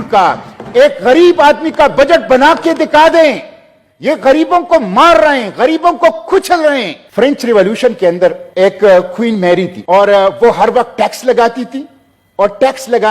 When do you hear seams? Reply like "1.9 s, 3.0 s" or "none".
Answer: 7.0 s, 8.4 s, 9.8 s